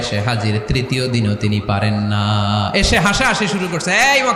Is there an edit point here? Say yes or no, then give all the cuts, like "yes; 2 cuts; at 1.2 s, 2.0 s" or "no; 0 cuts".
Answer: no; 0 cuts